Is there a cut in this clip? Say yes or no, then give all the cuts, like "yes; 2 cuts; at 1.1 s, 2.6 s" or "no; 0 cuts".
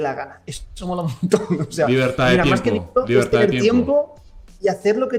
no; 0 cuts